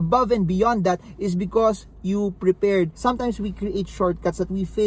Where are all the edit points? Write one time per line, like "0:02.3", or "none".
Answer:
0:02.9